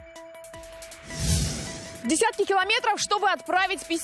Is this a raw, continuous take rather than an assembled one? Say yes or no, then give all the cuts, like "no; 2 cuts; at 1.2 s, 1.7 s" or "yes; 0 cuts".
no; 2 cuts; at 1.2 s, 1.9 s